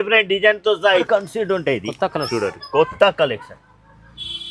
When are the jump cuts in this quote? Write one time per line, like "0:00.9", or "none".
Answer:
0:01.0